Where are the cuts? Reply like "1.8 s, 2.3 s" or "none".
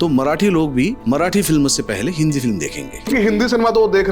1.0 s, 3.1 s